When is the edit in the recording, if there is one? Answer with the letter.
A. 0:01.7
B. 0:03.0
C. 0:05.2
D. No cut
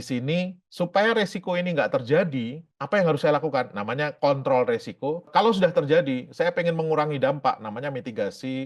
C